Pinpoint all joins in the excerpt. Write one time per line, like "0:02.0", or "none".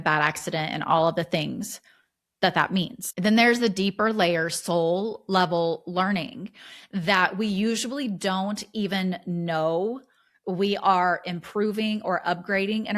0:03.0